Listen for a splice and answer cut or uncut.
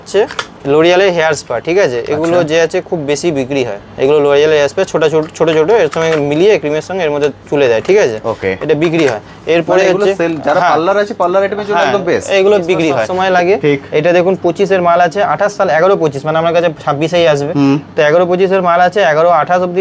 cut